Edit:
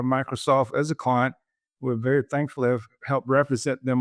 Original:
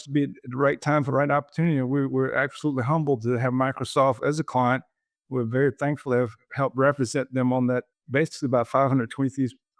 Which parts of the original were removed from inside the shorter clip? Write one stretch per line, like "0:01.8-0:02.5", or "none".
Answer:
none